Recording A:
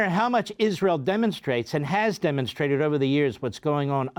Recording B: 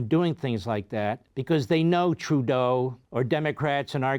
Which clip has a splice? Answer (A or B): B